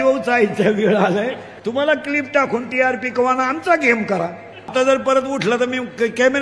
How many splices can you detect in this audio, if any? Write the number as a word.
two